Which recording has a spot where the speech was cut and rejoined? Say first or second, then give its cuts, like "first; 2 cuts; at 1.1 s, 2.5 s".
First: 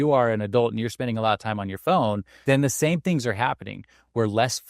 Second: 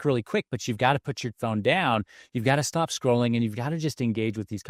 first; 1 cut; at 2.3 s